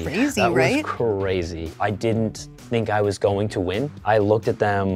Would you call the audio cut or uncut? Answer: cut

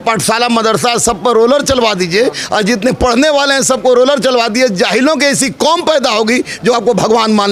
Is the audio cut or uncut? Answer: uncut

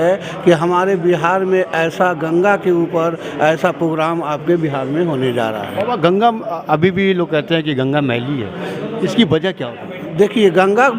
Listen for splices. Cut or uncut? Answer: uncut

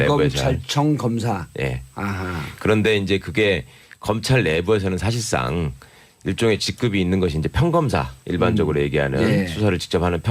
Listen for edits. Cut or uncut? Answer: cut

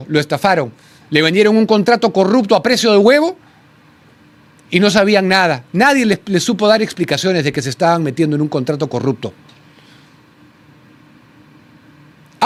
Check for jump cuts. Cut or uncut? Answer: uncut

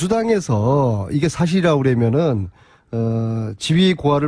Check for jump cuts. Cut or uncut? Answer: uncut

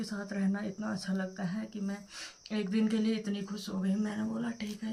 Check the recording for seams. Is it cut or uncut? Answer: uncut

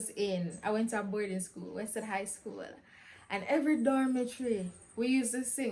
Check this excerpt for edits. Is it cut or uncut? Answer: uncut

